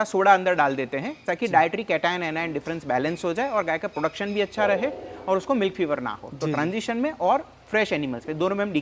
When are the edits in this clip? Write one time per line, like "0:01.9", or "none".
none